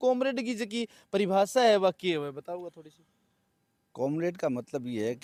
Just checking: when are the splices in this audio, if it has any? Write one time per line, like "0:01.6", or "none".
none